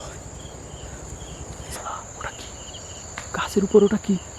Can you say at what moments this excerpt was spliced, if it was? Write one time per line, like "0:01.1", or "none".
0:01.8